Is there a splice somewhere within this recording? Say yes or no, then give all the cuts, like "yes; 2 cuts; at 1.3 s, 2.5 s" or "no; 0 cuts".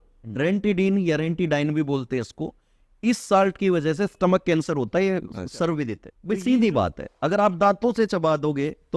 yes; 1 cut; at 6.1 s